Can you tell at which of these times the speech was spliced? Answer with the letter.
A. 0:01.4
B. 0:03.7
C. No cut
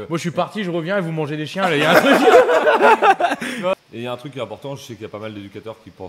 B